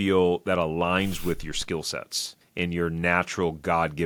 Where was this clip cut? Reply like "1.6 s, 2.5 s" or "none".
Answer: none